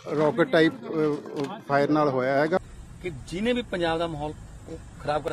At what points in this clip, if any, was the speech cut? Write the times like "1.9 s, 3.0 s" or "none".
2.6 s